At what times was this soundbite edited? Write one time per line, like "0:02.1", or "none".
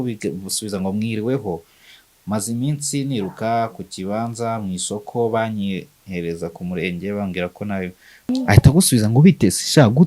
0:08.3